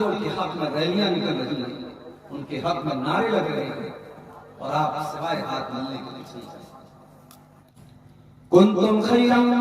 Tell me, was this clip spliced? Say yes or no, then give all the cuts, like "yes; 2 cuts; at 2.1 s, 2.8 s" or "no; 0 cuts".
yes; 1 cut; at 7.7 s